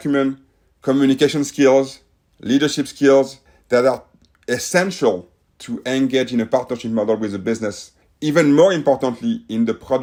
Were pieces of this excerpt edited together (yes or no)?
no